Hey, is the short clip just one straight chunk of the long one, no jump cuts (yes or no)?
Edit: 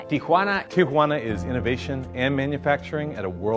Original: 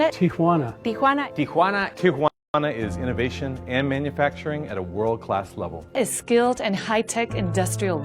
no